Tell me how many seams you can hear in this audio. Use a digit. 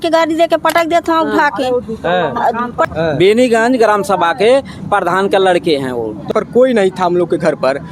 2